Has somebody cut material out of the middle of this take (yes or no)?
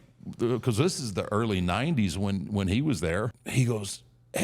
yes